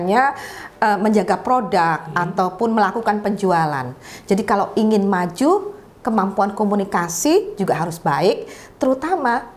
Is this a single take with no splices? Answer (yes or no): yes